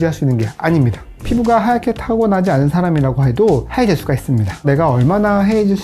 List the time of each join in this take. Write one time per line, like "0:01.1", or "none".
0:01.2
0:04.6